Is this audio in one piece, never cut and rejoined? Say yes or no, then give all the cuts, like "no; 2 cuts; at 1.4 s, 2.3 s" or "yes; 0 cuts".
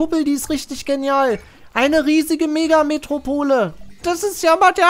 no; 1 cut; at 3.9 s